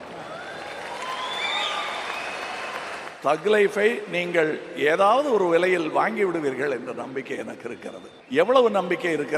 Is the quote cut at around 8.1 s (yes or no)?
yes